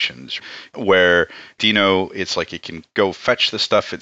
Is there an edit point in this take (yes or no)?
yes